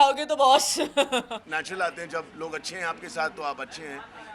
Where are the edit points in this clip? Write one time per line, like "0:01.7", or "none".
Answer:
0:01.4